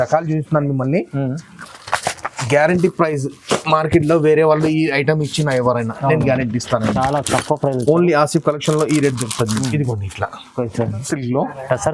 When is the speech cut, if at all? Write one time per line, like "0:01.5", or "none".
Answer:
0:01.6
0:11.0